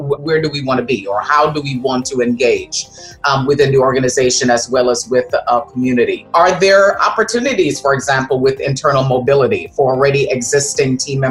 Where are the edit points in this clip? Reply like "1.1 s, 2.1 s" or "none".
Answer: none